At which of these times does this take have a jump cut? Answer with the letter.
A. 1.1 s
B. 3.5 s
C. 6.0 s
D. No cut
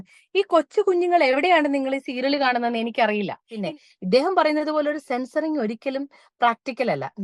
B